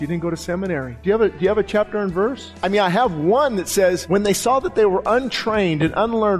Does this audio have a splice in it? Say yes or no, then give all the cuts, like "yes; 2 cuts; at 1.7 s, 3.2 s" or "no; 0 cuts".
yes; 3 cuts; at 0.9 s, 2.5 s, 4.0 s